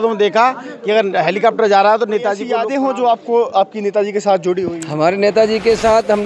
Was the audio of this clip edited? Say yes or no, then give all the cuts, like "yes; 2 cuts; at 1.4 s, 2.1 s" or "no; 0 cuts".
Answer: yes; 1 cut; at 2.5 s